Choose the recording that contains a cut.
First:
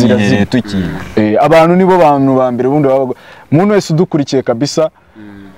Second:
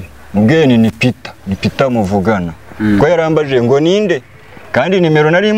first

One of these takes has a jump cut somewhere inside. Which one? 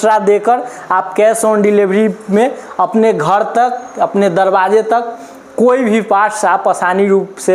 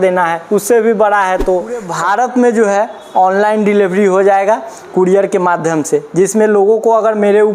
second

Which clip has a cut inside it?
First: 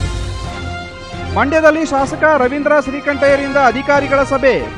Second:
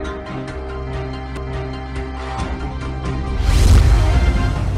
second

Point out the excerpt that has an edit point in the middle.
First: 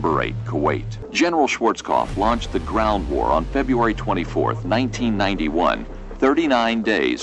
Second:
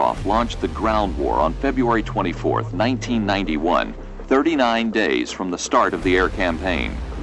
first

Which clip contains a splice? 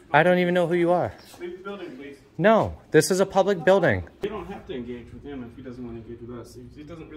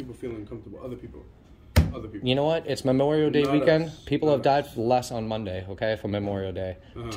first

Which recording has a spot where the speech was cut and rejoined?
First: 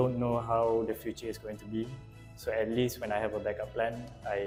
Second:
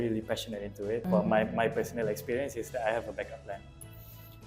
second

